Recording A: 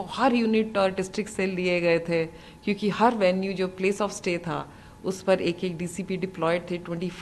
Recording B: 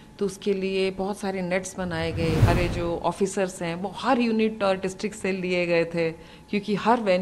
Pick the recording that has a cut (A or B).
B